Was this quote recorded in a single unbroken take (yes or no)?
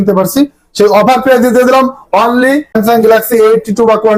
no